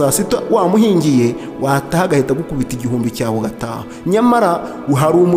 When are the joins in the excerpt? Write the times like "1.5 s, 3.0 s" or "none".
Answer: none